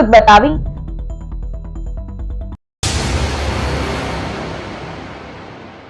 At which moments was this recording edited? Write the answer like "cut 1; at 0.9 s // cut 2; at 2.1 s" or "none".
cut 1; at 2.6 s